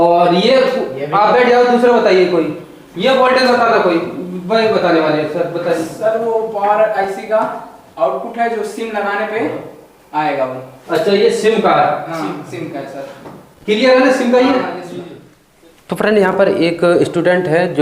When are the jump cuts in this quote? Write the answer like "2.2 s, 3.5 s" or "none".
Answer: 15.5 s